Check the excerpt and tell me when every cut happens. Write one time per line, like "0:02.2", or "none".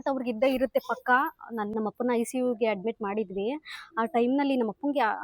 0:01.7